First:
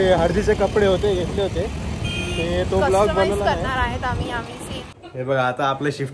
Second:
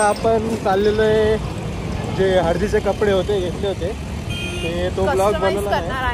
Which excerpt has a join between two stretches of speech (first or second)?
first